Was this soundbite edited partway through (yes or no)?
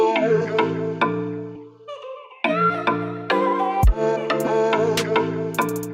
no